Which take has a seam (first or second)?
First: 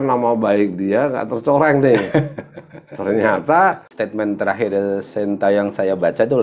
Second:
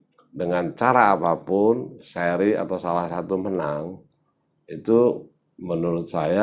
first